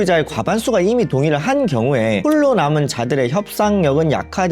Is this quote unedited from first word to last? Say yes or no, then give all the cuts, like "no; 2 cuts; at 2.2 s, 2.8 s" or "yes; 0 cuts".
yes; 0 cuts